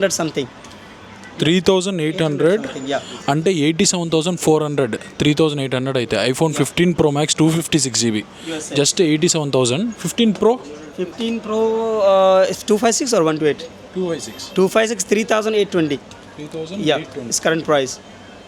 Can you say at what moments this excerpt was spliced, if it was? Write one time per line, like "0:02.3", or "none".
none